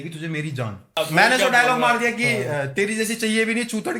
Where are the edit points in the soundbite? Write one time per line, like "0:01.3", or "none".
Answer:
0:01.0